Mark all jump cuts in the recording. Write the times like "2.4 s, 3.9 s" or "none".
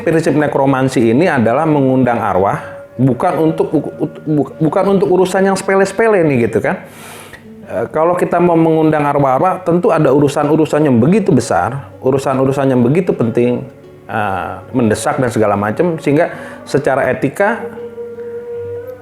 none